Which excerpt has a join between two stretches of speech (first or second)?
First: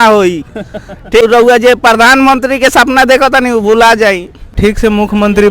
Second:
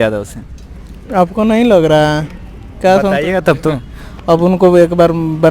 first